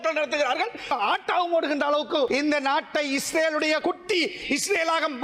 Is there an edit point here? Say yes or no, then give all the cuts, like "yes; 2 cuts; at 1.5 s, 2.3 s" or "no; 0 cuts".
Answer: yes; 3 cuts; at 0.9 s, 2.3 s, 3.8 s